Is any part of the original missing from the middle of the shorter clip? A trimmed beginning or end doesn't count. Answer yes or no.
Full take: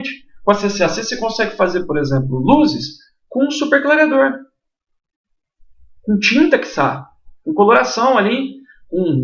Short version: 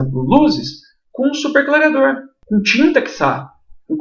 yes